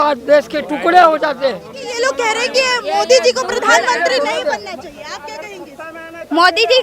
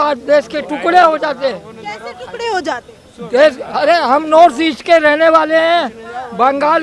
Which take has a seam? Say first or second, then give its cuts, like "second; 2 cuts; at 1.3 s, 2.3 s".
first; 1 cut; at 1.8 s